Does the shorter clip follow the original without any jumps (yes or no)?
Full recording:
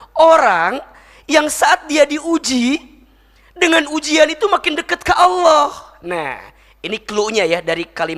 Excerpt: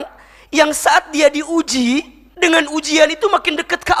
no